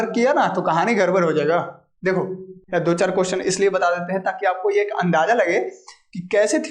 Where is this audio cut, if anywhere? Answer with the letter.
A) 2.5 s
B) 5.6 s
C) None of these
A